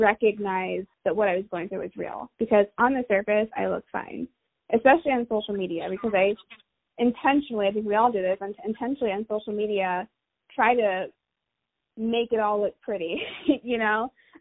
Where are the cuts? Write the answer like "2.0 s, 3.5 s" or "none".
0.9 s